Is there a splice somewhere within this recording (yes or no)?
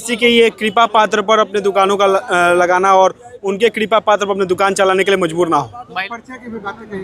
yes